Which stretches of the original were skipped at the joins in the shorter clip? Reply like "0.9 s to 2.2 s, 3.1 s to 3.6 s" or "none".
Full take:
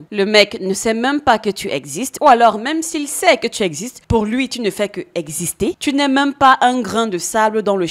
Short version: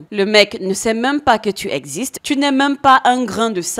2.2 s to 5.7 s